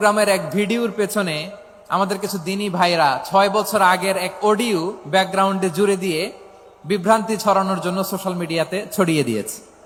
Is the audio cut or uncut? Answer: uncut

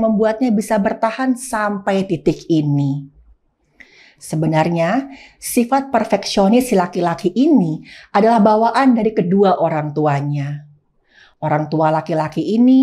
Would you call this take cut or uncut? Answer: uncut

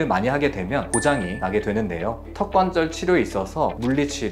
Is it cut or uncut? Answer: cut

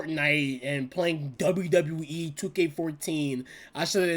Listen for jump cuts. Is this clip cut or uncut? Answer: cut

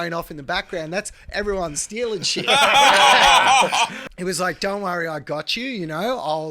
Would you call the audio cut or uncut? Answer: cut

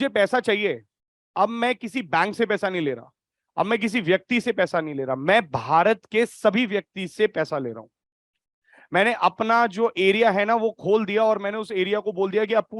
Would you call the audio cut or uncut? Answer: uncut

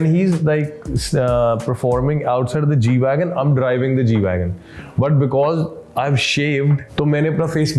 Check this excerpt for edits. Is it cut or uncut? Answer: uncut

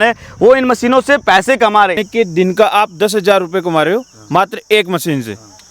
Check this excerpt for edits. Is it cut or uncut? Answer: cut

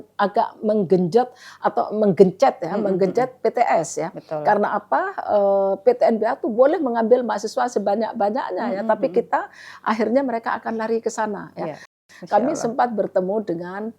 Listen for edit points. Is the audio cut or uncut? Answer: cut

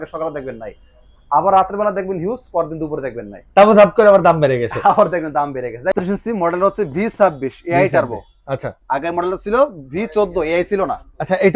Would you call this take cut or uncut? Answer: cut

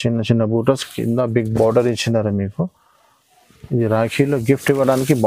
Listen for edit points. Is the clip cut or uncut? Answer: uncut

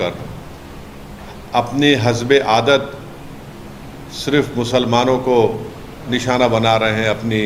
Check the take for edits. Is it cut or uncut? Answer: uncut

